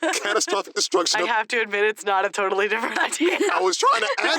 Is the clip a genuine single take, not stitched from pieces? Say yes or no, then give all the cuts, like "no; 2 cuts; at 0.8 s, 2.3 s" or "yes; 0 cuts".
no; 2 cuts; at 1.3 s, 3.3 s